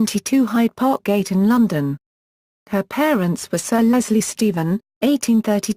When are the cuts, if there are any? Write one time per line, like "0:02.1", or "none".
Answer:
0:04.1

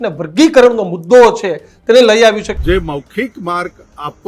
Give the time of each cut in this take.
0:02.5

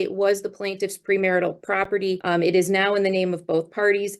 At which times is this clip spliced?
0:02.2

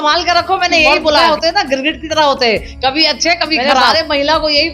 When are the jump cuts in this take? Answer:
0:01.2
0:03.9

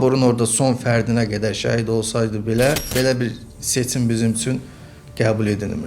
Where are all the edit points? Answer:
0:02.9

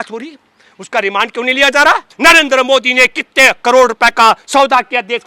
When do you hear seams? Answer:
0:02.1

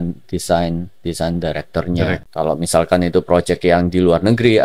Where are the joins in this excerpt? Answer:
0:02.2

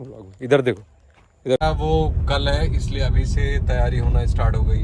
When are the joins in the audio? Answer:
0:01.6

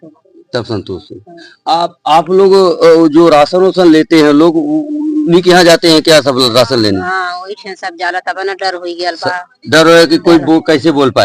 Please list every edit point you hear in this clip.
none

